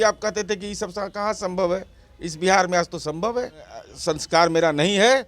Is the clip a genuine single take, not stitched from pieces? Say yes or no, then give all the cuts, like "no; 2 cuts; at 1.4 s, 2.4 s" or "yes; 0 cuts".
no; 1 cut; at 3.8 s